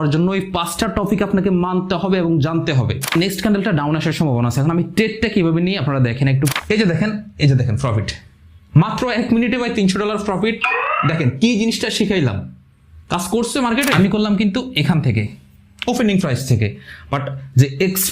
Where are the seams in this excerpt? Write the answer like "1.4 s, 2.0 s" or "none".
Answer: 3.2 s, 6.5 s, 13.9 s